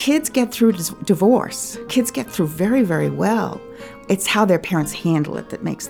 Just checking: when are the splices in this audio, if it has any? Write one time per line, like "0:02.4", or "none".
0:01.9